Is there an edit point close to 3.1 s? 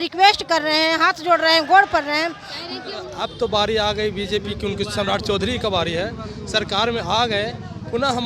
yes; 1 cut; at 3.1 s

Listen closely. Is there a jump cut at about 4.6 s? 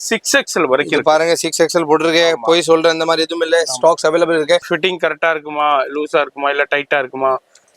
yes; 1 cut; at 4.6 s

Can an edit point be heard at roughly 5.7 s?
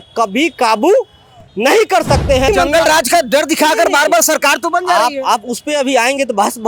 no; 1 cut; at 2.5 s

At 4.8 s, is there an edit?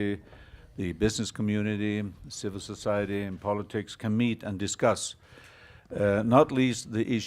no; 1 cut; at 1.2 s

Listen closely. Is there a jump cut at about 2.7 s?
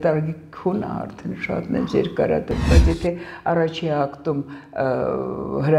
yes; 1 cut; at 2.7 s

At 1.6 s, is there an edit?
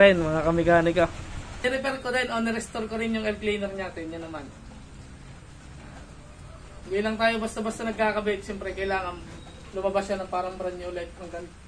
yes; 1 cut; at 1.6 s

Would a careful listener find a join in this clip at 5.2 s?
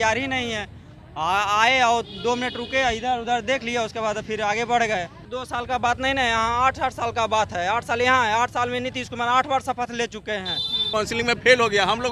yes; 2 cuts; at 5.2 s, 10.8 s

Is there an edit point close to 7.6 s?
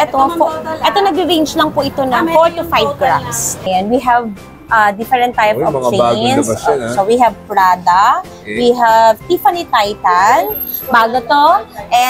no; 1 cut; at 3.6 s

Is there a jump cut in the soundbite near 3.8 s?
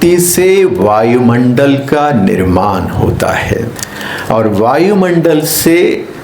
yes; 1 cut; at 3.8 s

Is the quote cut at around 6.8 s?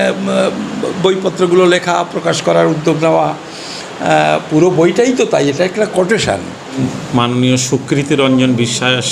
yes; 1 cut; at 6.8 s

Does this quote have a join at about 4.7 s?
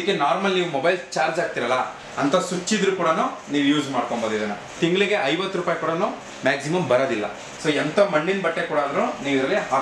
yes; 2 cuts; at 4.7 s, 7.5 s

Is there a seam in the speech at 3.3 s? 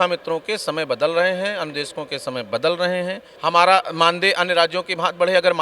yes; 1 cut; at 3.3 s

